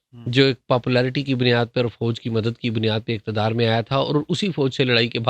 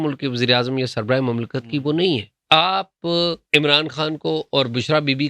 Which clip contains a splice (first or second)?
second